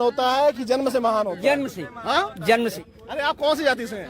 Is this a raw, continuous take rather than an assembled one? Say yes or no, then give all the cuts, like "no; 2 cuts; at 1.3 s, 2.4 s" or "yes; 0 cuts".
no; 1 cut; at 2.8 s